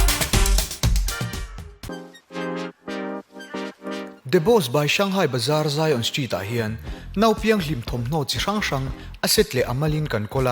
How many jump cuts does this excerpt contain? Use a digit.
1